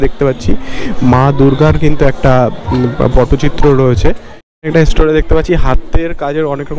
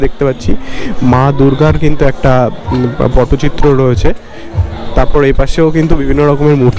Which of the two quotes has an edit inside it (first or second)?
first